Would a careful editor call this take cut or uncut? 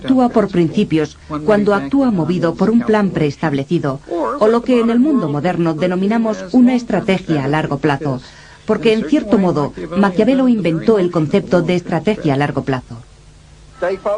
cut